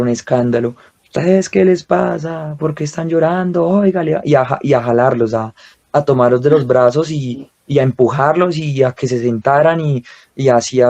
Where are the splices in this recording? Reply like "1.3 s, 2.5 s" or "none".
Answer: none